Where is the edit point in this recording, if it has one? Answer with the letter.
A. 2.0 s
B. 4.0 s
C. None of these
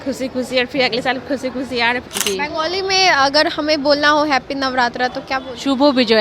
A